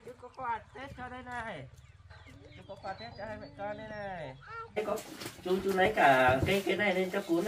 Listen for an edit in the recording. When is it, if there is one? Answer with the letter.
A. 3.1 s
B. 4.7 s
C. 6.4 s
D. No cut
B